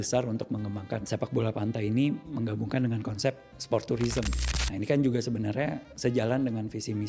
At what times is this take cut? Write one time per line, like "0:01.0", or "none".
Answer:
0:01.0
0:04.4